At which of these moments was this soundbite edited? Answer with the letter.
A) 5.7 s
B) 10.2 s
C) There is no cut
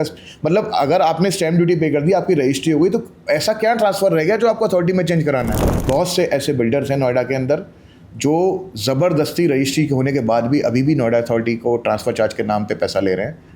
A